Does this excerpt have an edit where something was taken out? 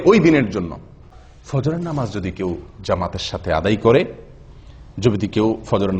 yes; 1 cut; at 1.0 s

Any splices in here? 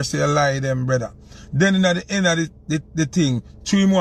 no; 0 cuts

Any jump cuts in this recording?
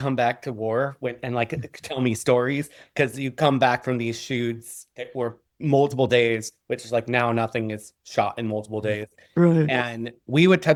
no; 0 cuts

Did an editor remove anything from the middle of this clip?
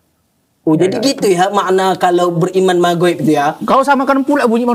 no; 0 cuts

